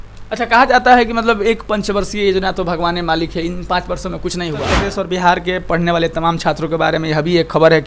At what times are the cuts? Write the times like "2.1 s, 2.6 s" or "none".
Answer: 4.8 s